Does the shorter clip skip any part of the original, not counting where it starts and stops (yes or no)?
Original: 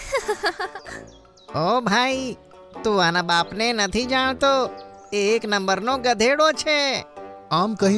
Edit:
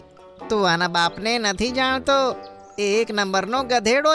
no